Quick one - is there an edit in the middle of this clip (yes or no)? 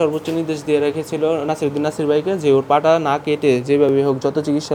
no